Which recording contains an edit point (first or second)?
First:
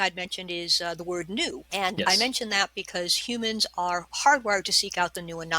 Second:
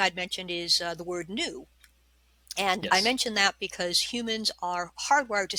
first